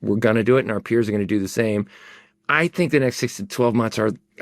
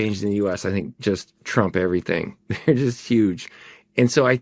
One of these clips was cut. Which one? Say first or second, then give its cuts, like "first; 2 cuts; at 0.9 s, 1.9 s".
first; 1 cut; at 2.2 s